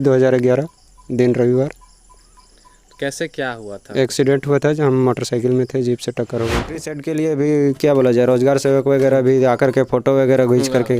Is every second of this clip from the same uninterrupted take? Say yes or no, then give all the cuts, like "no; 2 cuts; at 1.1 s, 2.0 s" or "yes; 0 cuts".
no; 1 cut; at 7.0 s